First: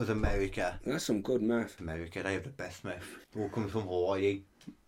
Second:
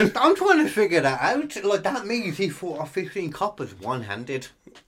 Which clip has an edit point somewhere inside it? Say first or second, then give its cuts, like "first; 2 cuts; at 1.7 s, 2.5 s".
first; 2 cuts; at 1.8 s, 3.2 s